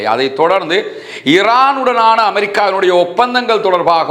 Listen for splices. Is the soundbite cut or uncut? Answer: uncut